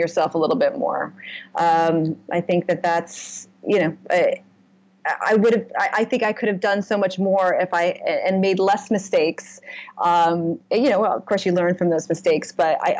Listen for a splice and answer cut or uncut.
uncut